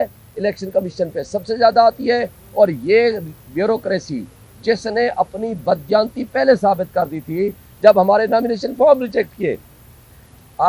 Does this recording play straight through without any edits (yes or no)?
yes